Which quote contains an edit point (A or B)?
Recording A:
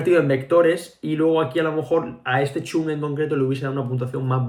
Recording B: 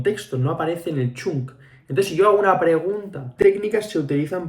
B